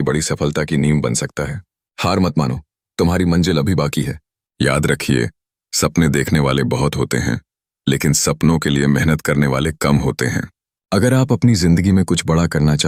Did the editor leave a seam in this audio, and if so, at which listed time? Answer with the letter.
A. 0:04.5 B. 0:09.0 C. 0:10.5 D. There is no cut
D